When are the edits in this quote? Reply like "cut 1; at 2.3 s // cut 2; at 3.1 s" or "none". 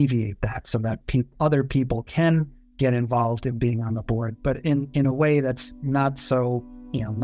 none